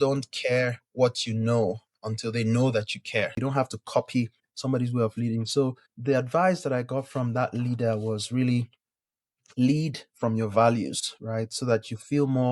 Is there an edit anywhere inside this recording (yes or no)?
yes